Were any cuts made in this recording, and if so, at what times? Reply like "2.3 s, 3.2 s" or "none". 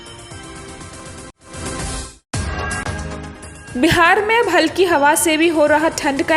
2.1 s